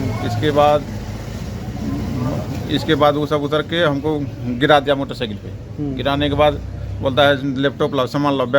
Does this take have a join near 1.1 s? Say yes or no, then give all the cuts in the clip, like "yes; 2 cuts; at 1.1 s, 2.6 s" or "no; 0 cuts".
no; 0 cuts